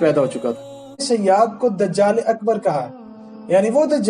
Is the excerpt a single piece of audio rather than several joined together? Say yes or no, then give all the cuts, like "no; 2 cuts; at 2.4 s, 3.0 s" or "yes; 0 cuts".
no; 1 cut; at 1.1 s